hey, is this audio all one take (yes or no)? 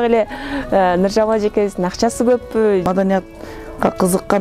no